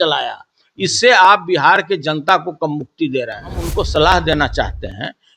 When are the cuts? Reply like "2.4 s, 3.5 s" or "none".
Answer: 3.7 s